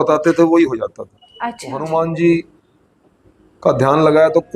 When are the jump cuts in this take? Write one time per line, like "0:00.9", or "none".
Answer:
0:01.7